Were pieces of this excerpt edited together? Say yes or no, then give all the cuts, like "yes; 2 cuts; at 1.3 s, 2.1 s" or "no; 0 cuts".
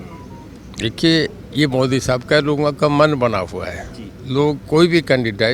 no; 0 cuts